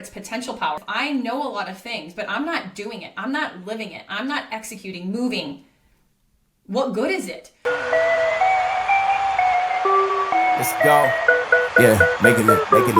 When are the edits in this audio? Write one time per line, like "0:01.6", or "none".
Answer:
0:00.8
0:07.4